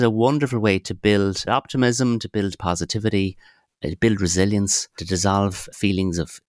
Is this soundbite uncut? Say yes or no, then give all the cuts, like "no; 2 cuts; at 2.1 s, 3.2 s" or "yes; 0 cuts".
no; 1 cut; at 1.4 s